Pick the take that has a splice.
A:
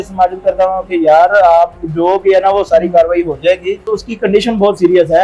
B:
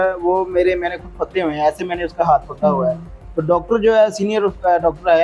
A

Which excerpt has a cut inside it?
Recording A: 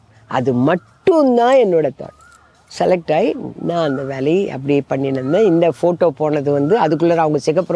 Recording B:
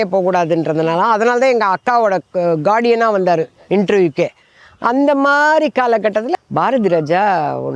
B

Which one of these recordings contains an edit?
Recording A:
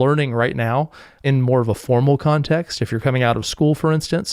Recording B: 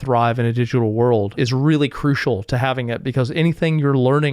B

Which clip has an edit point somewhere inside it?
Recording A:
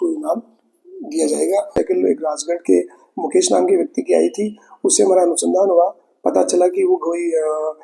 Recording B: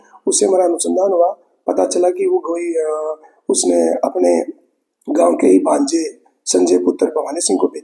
A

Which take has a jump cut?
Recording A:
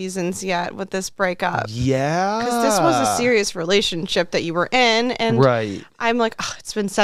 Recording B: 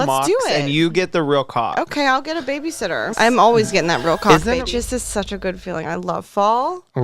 B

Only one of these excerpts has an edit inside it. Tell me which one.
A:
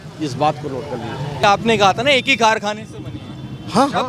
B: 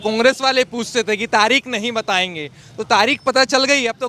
A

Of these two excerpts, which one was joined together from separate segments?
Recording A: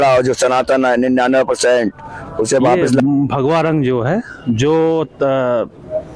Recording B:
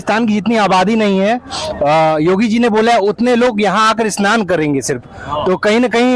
A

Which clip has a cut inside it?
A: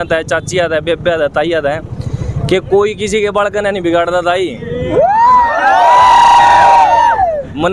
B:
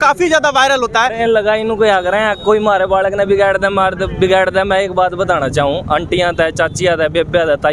B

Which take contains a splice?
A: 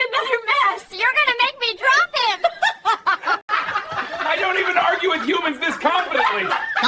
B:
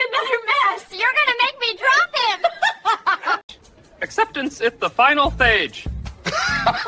A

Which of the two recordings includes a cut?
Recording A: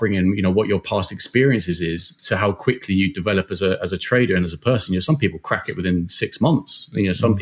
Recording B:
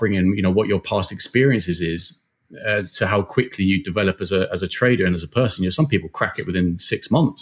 A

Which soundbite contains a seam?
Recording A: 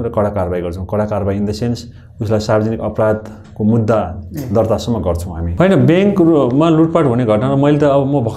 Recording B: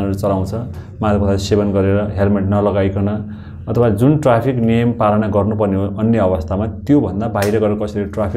A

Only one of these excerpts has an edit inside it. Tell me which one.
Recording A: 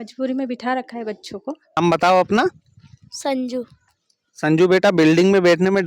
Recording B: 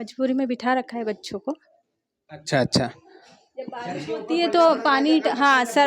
A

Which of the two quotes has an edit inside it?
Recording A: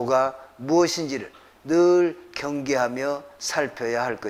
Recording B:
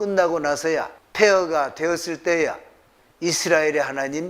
B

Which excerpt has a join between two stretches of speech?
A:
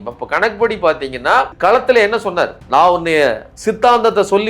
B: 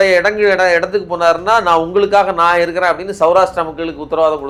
A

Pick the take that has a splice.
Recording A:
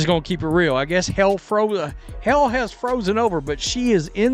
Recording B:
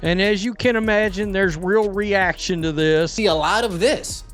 B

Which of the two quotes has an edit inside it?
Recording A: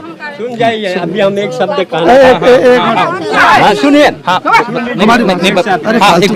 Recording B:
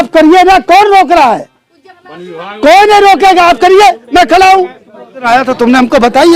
B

